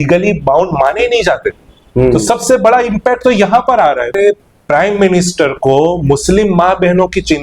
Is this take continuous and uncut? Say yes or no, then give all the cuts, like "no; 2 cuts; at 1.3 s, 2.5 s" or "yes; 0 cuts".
no; 1 cut; at 4.1 s